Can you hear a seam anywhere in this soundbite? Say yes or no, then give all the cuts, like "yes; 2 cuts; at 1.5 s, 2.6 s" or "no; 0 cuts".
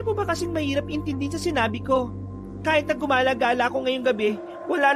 no; 0 cuts